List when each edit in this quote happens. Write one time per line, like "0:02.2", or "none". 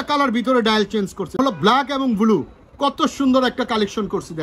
0:01.4